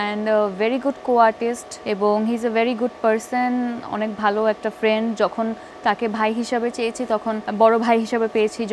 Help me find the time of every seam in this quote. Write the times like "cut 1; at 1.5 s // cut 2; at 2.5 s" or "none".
cut 1; at 1.7 s // cut 2; at 7.4 s